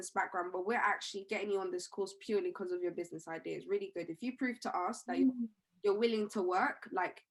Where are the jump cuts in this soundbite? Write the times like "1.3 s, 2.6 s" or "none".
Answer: none